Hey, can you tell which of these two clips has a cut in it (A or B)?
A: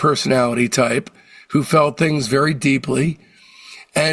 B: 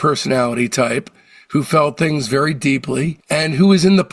B